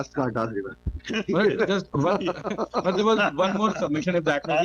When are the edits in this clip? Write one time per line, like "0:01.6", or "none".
none